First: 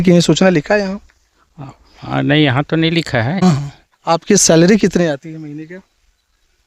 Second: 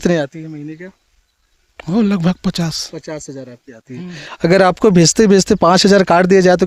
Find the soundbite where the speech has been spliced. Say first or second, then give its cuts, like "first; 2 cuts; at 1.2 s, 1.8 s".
first; 1 cut; at 3.4 s